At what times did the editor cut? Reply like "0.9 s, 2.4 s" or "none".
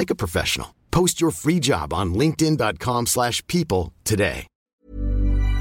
4.7 s